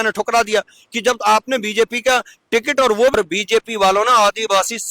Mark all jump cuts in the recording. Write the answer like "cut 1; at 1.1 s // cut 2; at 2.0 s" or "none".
cut 1; at 3.1 s